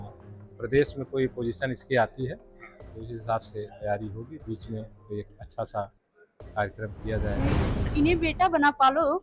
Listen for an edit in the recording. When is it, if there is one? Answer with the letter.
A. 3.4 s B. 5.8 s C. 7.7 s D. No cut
C